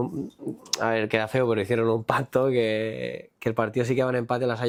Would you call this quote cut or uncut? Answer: uncut